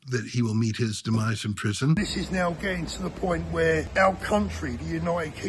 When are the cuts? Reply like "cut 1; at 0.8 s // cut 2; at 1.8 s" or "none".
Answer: cut 1; at 2.0 s // cut 2; at 3.9 s